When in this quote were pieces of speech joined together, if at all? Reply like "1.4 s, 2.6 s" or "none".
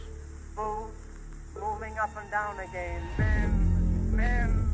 none